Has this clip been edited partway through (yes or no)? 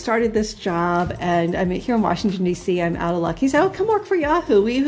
no